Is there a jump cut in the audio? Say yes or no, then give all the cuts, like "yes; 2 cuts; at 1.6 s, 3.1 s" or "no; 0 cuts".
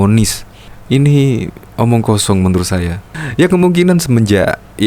no; 0 cuts